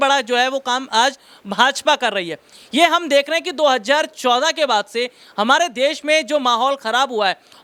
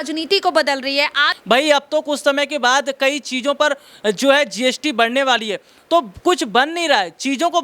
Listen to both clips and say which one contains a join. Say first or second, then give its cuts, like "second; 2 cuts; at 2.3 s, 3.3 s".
second; 1 cut; at 1.3 s